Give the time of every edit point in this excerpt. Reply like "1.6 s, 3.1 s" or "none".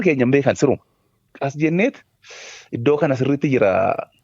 1.3 s